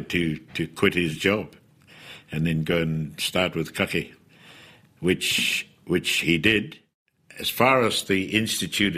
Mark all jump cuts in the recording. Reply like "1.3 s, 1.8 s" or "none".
none